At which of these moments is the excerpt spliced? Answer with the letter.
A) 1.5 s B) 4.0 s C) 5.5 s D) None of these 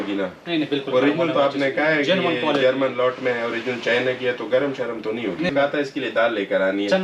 C